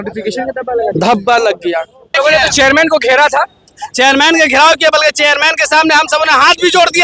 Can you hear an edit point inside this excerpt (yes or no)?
yes